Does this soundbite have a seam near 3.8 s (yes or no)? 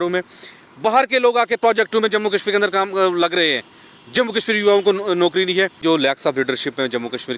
no